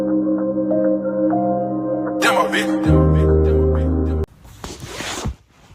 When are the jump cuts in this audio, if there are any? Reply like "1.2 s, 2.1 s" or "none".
4.2 s